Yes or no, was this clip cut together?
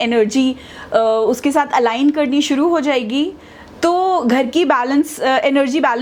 no